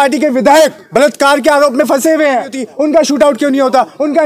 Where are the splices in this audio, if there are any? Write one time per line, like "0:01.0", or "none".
0:02.6

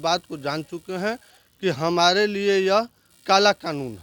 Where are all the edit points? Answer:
none

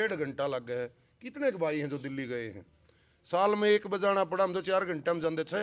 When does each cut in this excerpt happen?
none

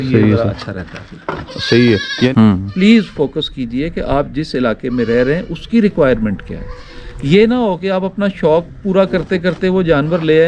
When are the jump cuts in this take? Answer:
0:02.3

